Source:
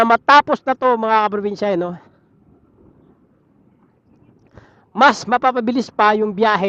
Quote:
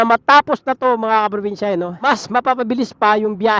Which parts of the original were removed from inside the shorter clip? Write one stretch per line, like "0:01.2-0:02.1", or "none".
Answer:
0:02.0-0:05.0